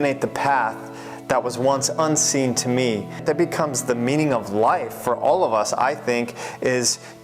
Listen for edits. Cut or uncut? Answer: cut